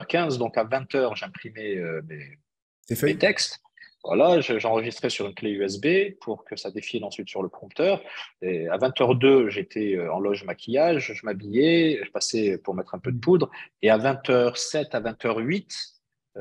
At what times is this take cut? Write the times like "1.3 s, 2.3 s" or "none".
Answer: none